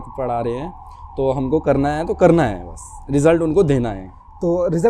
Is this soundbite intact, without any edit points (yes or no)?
yes